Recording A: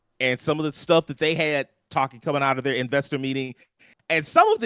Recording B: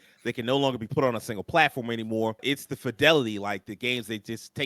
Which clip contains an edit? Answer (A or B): B